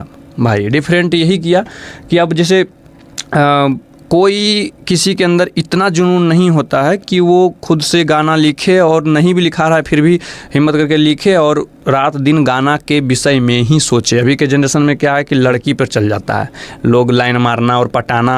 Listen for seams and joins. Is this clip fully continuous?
yes; 0 cuts

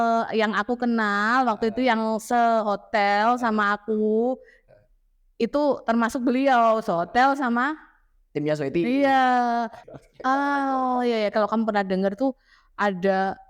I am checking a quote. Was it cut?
yes; 1 cut; at 9.8 s

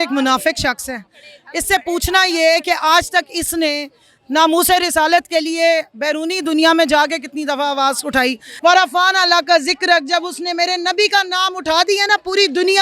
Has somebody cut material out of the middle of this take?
yes; 1 cut; at 8.5 s

